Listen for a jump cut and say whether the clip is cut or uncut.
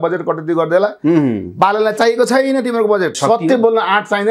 cut